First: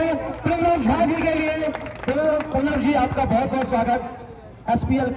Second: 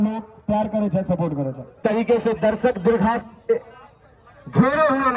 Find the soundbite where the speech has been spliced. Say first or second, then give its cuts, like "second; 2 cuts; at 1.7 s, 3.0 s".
second; 1 cut; at 1.8 s